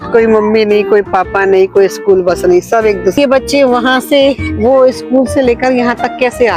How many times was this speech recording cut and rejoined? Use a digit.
1